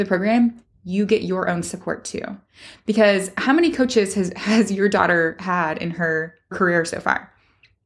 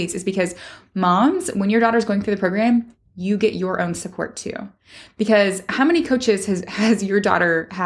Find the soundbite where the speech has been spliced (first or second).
first